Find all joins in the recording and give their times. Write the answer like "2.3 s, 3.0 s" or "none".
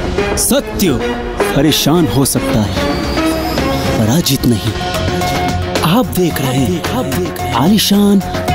none